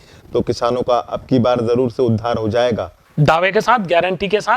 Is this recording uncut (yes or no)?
no